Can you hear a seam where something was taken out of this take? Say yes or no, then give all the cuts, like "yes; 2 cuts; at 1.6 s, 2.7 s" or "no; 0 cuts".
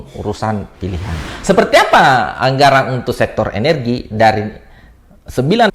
yes; 1 cut; at 1.3 s